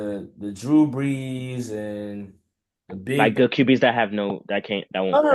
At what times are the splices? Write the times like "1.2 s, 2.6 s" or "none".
none